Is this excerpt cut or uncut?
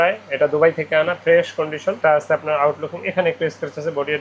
cut